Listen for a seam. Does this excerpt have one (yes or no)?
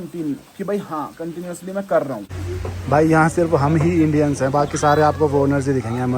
yes